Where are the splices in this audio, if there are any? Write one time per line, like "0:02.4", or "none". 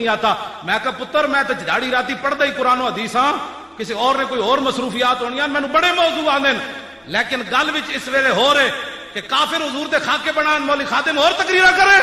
none